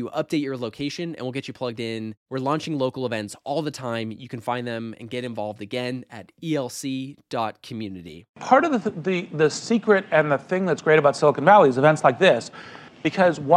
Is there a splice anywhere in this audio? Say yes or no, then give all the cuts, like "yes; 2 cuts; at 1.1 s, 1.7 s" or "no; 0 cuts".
yes; 1 cut; at 8.4 s